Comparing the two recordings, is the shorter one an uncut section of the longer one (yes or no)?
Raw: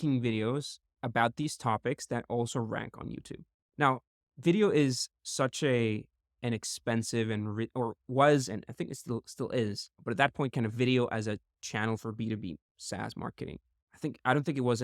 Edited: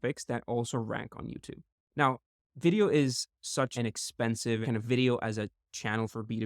no